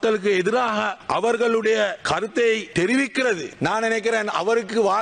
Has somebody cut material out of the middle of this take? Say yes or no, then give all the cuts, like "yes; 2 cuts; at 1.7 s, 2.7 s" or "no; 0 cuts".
yes; 3 cuts; at 1.0 s, 2.0 s, 3.1 s